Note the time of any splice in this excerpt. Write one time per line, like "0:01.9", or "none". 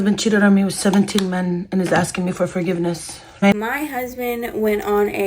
0:03.5